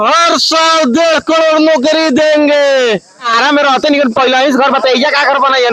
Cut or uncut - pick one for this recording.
cut